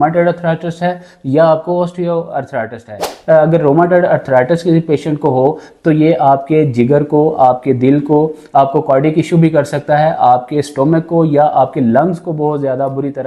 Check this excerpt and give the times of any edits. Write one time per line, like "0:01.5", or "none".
0:03.1